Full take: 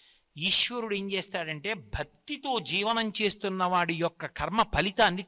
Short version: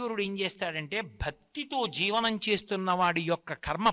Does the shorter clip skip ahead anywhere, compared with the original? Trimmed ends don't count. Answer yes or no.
no